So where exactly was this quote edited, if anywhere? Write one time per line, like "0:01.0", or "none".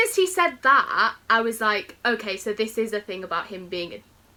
none